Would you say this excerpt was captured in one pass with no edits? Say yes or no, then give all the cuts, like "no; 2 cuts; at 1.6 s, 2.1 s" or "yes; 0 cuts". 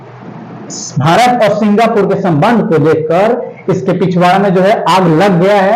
yes; 0 cuts